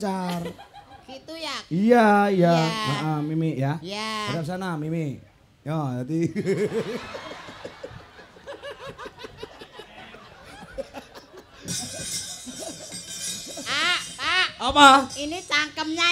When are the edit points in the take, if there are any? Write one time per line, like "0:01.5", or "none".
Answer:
none